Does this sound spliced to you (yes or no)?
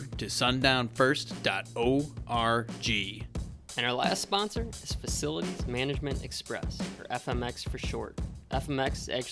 yes